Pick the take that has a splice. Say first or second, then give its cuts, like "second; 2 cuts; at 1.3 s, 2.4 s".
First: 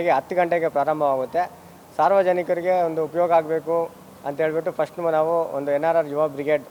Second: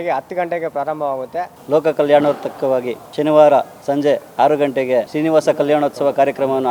second; 3 cuts; at 1.6 s, 3.0 s, 5.1 s